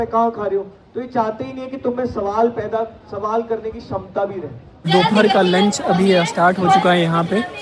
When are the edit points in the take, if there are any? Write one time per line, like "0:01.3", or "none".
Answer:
0:04.8